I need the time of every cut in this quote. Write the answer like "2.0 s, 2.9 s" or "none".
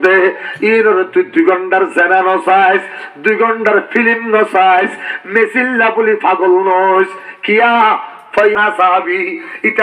8.5 s